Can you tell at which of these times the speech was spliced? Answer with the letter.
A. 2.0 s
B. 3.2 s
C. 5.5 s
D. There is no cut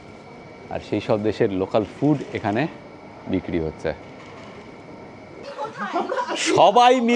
C